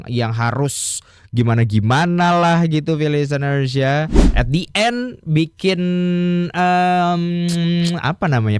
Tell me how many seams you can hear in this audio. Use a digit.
1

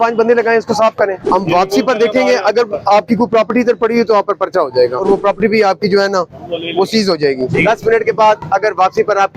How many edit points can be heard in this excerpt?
3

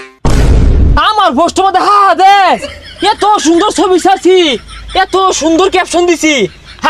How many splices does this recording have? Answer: 1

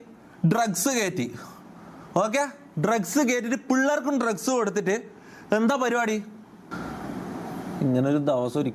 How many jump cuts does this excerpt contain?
1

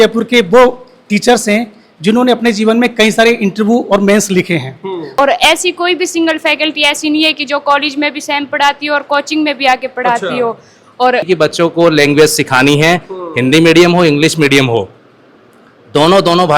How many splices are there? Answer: 2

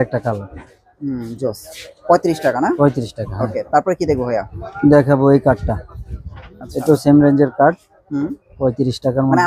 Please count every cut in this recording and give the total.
1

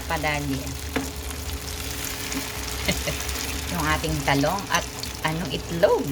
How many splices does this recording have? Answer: 2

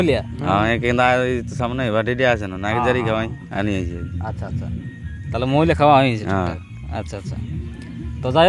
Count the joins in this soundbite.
0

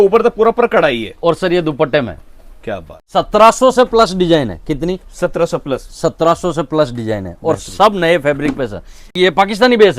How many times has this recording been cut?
2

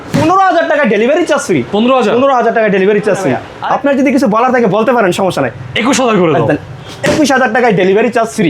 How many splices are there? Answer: 1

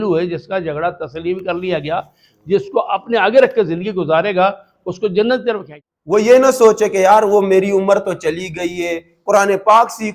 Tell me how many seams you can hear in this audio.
1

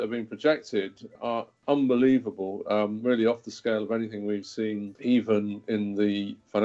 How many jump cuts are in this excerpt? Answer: 2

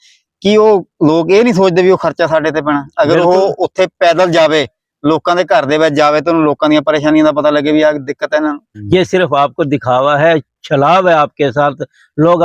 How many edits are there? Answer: 1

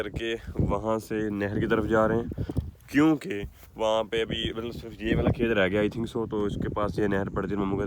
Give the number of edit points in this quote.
0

